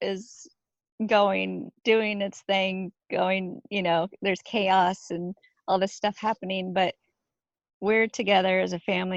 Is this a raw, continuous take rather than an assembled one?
yes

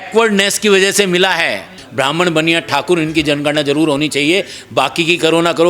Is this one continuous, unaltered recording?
no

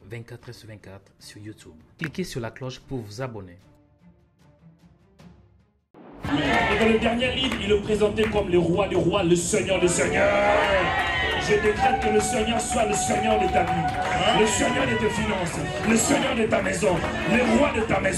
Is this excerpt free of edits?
no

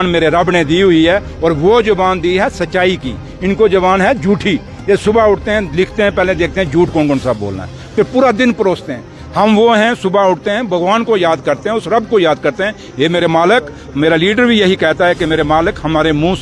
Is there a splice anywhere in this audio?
no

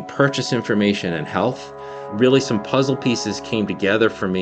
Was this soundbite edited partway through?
no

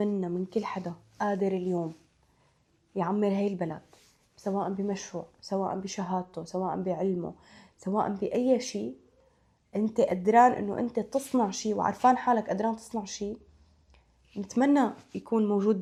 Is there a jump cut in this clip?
no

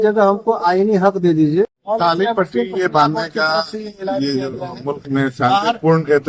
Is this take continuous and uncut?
no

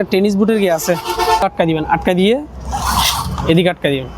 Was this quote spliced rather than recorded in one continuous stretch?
yes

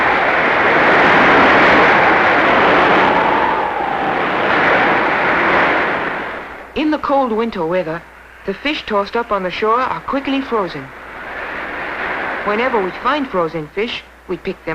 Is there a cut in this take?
no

